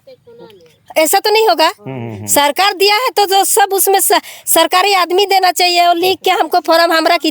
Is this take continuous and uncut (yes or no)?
yes